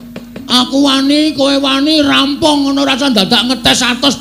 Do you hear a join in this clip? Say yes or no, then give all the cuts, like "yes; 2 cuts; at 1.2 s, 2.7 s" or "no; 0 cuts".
no; 0 cuts